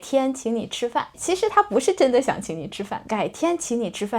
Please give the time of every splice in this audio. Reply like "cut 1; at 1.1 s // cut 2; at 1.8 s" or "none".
cut 1; at 1.2 s // cut 2; at 3.0 s